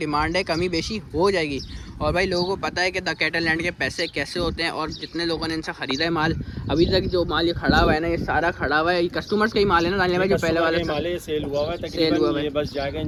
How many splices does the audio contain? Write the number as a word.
zero